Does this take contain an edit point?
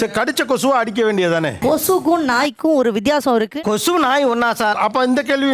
yes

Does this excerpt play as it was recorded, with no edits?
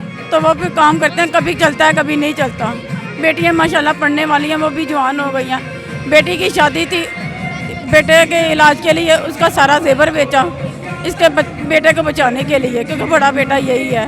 yes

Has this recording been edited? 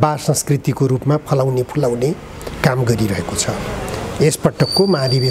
no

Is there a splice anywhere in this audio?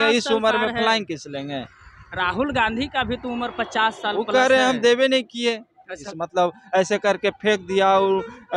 yes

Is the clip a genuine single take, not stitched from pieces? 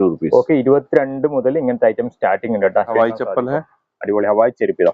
no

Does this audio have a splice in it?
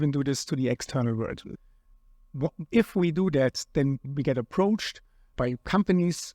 yes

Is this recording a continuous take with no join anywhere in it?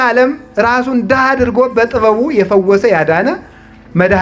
yes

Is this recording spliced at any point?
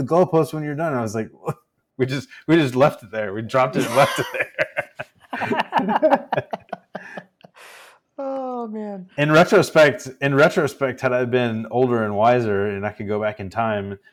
no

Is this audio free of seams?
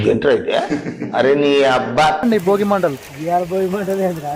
no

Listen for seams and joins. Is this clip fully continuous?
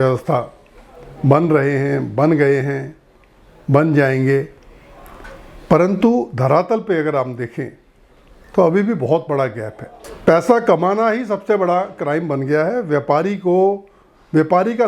no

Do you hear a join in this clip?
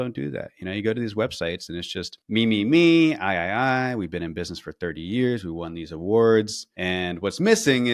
no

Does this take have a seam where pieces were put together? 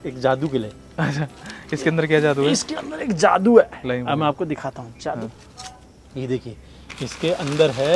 no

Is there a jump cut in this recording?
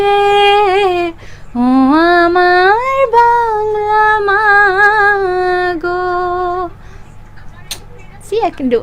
no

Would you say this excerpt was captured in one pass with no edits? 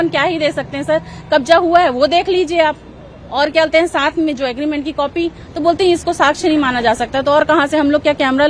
yes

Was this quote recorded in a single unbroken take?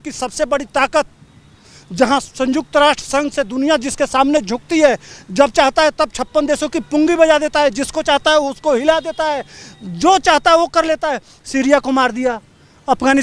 yes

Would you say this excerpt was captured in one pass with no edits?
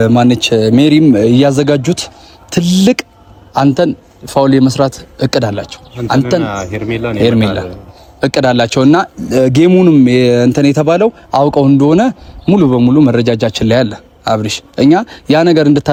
yes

